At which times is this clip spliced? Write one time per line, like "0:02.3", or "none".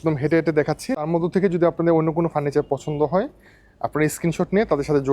0:01.0